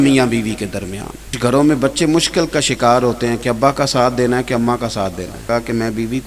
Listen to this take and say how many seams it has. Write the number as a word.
two